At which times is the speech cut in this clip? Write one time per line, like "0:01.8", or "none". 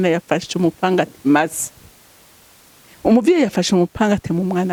none